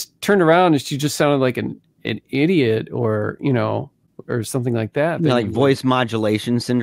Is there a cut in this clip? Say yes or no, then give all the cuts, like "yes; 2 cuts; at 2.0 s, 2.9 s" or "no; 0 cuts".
no; 0 cuts